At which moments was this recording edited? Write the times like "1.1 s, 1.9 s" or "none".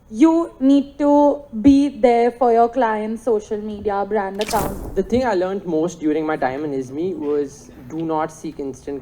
4.7 s